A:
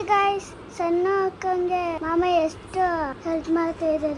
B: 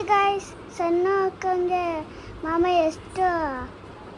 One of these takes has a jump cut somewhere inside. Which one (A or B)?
A